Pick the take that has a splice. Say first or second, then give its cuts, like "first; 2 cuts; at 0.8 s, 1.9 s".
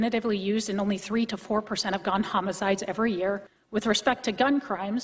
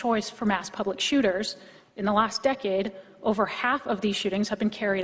first; 1 cut; at 3.5 s